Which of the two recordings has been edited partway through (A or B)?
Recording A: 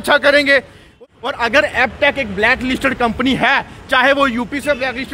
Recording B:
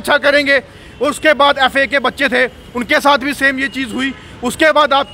A